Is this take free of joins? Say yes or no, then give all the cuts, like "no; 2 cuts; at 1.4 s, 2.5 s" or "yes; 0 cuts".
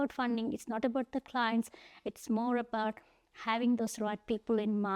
yes; 0 cuts